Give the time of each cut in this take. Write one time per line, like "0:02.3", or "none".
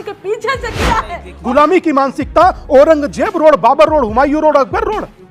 0:01.2